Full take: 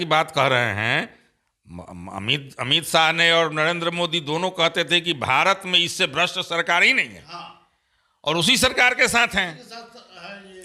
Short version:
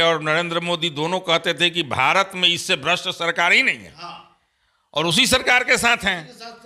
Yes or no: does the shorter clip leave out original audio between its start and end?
no